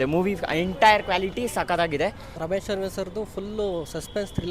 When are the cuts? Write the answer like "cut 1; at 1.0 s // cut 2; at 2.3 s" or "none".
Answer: cut 1; at 2.3 s